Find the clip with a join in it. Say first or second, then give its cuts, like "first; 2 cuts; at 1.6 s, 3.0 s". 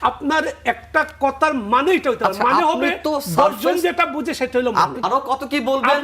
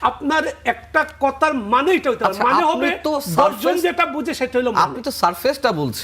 first; 1 cut; at 5.0 s